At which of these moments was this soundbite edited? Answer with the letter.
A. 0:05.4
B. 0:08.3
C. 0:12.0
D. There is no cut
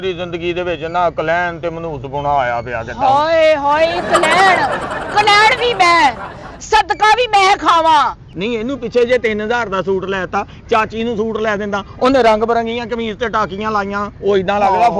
B